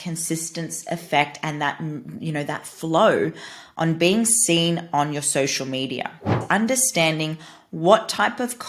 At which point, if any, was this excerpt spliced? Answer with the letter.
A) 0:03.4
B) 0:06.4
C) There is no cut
B